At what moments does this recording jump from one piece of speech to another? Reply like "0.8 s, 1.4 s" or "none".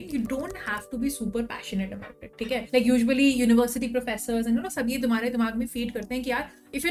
none